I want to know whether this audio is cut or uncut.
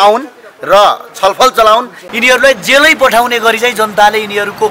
cut